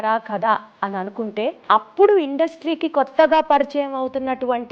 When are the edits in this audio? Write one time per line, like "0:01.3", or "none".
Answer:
0:01.6